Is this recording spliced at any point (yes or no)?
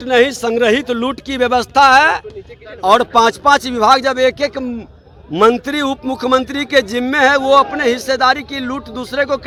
no